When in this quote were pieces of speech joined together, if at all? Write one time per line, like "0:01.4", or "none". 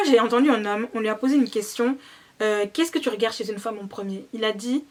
none